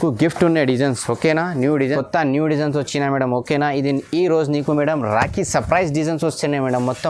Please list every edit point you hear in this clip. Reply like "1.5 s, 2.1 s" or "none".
1.8 s